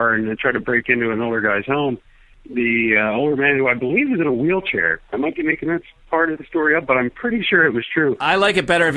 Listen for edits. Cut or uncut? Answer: uncut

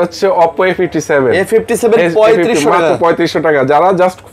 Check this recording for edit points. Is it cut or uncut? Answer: uncut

